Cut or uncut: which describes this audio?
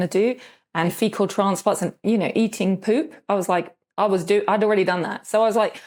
uncut